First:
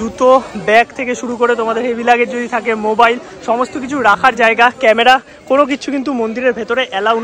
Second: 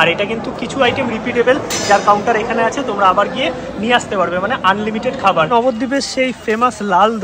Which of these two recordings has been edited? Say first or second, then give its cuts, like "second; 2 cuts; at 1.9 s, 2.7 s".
second; 1 cut; at 5.5 s